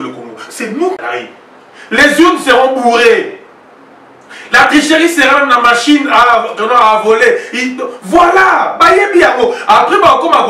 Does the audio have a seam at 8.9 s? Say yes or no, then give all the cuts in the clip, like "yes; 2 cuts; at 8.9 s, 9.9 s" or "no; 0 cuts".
no; 1 cut; at 1.0 s